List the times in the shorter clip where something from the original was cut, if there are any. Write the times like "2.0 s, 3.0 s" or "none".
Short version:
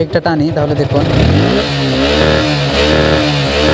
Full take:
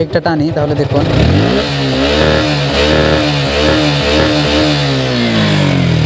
none

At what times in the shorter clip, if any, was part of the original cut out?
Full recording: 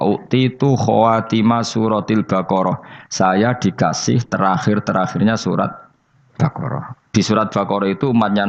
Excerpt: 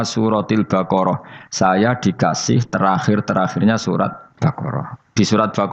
4.2 s

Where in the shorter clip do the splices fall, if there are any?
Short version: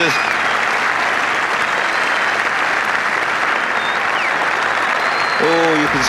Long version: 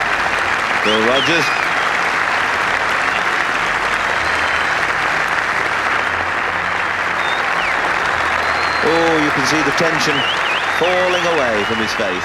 1.1 s, 2.3 s, 3.8 s

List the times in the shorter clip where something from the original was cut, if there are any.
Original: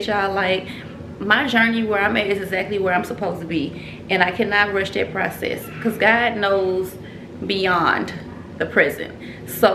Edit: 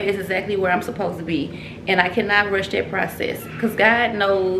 none

